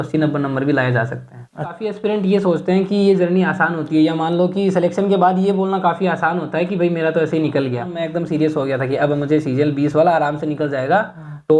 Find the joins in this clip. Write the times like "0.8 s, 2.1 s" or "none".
1.9 s, 7.9 s